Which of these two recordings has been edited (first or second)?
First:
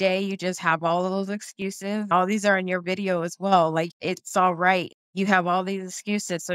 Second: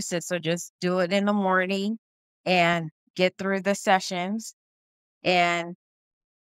first